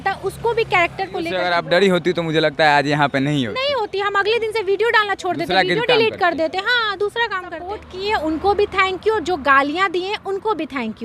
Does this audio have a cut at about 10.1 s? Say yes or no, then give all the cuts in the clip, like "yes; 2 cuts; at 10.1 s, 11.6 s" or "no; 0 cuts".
no; 2 cuts; at 1.4 s, 7.9 s